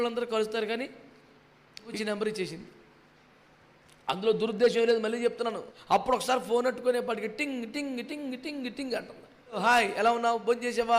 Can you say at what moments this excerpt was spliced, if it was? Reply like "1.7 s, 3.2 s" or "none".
1.9 s, 5.7 s, 9.6 s